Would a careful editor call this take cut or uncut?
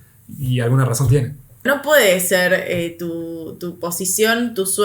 cut